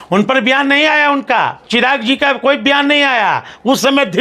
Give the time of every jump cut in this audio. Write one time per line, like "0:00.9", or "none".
0:01.6